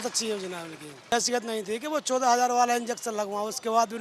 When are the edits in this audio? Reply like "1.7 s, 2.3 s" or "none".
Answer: 1.1 s